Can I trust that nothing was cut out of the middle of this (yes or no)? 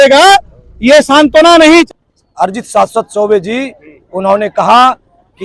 no